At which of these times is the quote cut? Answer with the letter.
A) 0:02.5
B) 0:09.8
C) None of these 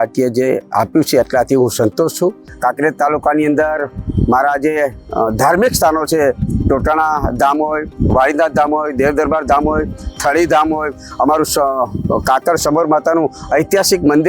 A